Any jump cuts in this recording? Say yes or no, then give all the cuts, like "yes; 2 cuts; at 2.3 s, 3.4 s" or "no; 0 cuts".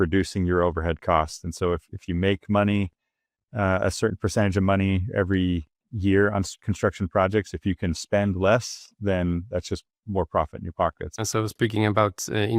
yes; 1 cut; at 11.0 s